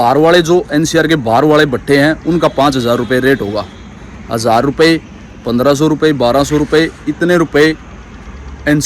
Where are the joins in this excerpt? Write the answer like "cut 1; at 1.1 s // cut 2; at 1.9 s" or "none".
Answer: none